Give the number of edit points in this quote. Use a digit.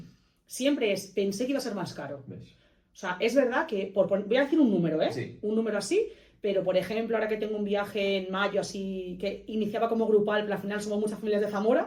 0